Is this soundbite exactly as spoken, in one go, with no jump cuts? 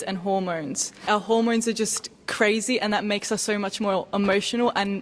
no; 1 cut; at 1.0 s

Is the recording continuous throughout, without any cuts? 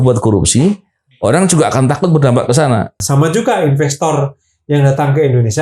no; 1 cut; at 3.0 s

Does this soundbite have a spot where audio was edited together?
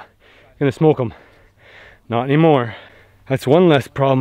yes; 1 cut; at 3.0 s

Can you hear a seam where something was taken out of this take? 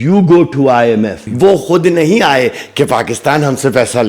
yes; 1 cut; at 1.3 s

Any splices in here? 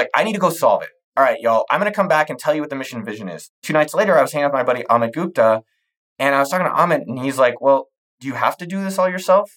yes; 1 cut; at 3.5 s

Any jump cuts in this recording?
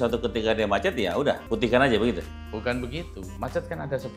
yes; 2 cuts; at 1.4 s, 3.2 s

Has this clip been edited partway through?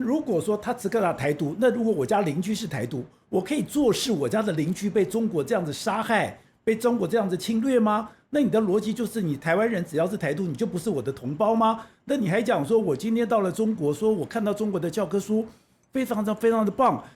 no; 0 cuts

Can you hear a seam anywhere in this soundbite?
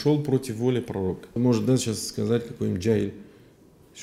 yes; 1 cut; at 1.3 s

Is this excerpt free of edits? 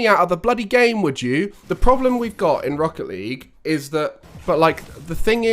no; 2 cuts; at 1.6 s, 4.2 s

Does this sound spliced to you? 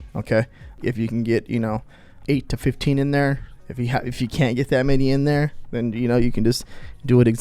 no; 0 cuts

